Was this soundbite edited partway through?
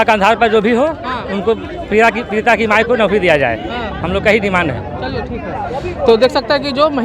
no; 0 cuts

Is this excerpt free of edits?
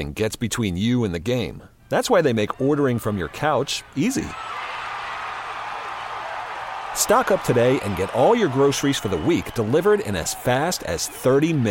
yes; 0 cuts

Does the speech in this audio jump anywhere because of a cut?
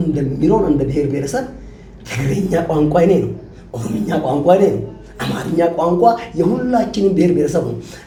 no; 0 cuts

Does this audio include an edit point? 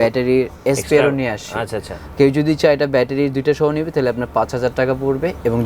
no; 0 cuts

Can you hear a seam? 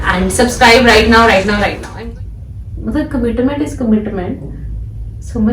yes; 1 cut; at 1.8 s

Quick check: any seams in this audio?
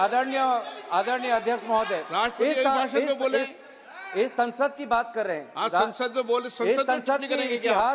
no; 0 cuts

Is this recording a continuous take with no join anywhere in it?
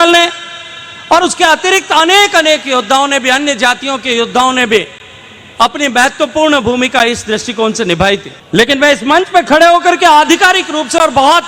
no; 1 cut; at 8.4 s

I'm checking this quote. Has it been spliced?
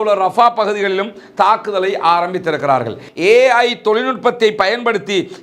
yes; 1 cut; at 3.0 s

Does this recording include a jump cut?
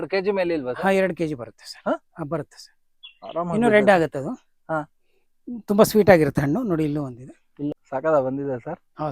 yes; 1 cut; at 7.7 s

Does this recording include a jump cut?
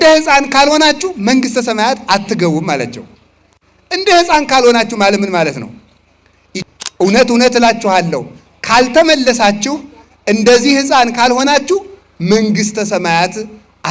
yes; 1 cut; at 6.5 s

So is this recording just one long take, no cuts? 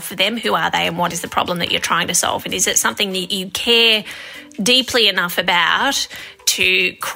no; 1 cut; at 1.1 s

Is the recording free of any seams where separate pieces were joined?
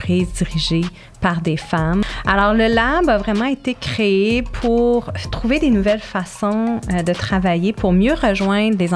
no; 1 cut; at 2.0 s

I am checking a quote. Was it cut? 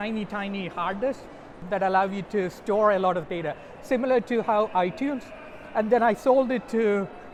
no; 0 cuts

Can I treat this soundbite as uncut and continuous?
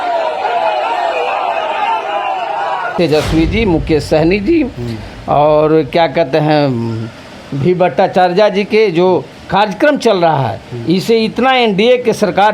no; 1 cut; at 2.9 s

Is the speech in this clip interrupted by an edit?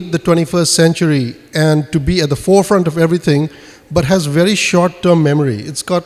no; 0 cuts

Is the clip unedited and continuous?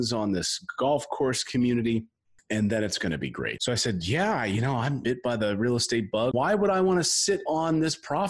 no; 3 cuts; at 3.6 s, 5.0 s, 6.3 s

